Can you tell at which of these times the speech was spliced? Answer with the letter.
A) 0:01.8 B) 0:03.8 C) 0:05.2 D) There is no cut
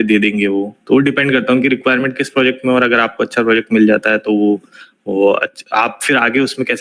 D